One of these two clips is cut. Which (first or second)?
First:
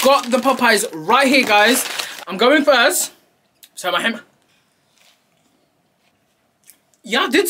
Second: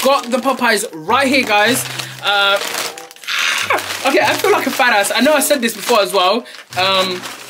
first